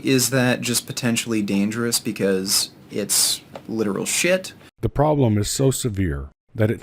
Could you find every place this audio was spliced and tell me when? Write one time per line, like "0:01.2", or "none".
0:04.6

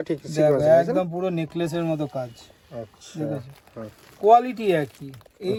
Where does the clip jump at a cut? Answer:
none

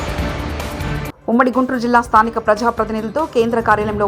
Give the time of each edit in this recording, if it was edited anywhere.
none

